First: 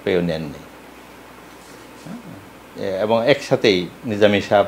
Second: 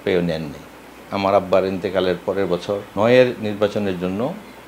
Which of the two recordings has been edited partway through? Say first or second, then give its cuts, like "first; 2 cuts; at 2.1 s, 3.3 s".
second; 2 cuts; at 1.0 s, 2.9 s